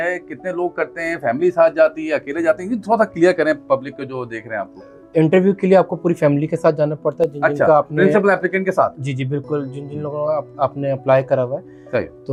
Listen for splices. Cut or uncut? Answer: uncut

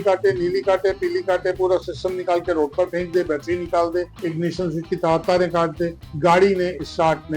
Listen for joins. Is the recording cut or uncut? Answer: cut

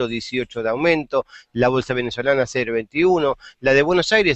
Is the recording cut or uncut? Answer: uncut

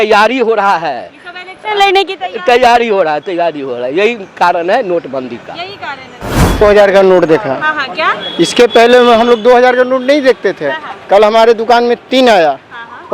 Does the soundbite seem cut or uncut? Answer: cut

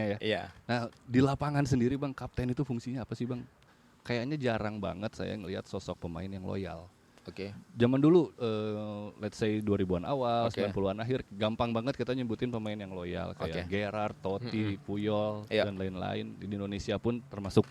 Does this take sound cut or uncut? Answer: cut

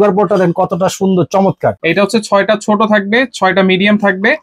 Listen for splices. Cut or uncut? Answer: cut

